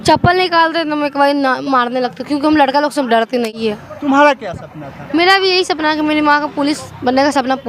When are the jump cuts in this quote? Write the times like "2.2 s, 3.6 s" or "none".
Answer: 3.5 s